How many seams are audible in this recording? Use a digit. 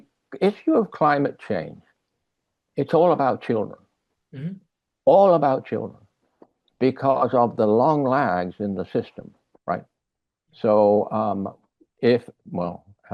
0